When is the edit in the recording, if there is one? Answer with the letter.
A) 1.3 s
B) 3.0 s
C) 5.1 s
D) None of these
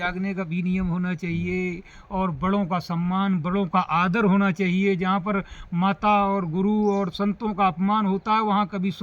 D